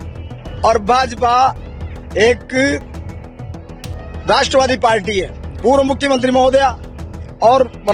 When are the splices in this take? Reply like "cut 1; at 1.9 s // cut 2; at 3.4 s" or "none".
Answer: cut 1; at 5.4 s